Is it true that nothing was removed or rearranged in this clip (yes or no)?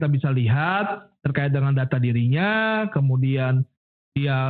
yes